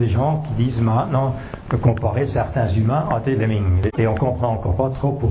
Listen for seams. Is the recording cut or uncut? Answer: cut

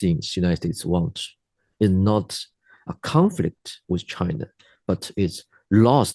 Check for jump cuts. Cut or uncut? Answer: uncut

